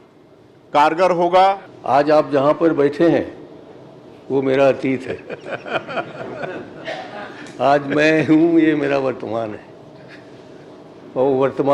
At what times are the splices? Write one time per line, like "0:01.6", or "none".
0:01.7